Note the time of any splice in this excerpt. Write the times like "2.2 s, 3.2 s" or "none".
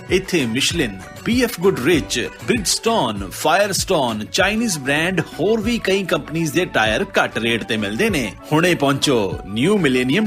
none